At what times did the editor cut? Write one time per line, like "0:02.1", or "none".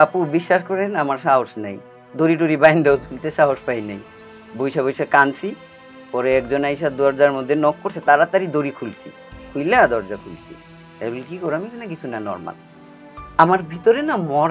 none